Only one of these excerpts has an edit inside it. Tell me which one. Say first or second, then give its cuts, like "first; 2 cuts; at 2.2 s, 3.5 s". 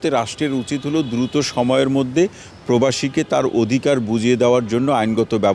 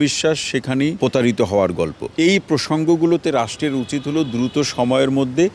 second; 2 cuts; at 1.0 s, 2.0 s